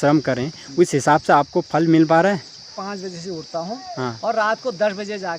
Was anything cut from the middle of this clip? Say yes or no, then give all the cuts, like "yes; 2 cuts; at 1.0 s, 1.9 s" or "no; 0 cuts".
yes; 1 cut; at 2.8 s